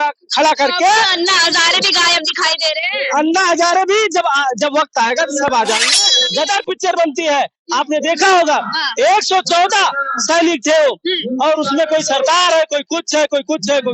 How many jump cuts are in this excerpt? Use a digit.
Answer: 1